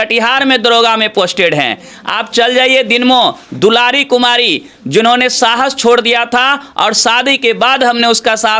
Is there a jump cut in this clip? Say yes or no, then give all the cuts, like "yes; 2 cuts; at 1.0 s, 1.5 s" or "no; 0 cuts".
no; 0 cuts